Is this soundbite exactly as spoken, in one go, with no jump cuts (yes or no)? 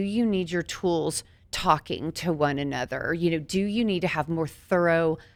yes